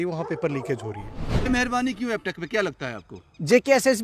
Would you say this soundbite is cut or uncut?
cut